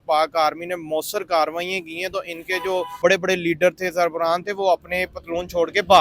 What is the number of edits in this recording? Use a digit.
1